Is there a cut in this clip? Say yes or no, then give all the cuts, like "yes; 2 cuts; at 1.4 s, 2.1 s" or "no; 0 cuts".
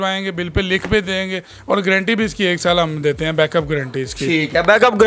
no; 0 cuts